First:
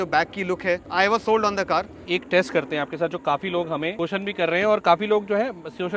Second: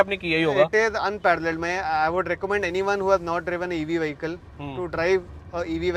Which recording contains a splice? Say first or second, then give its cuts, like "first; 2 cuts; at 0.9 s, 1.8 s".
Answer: first; 3 cuts; at 0.9 s, 2.0 s, 3.9 s